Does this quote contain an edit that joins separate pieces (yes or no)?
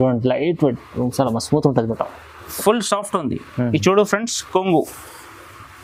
no